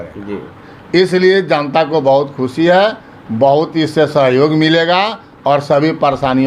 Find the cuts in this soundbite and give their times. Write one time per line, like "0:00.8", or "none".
none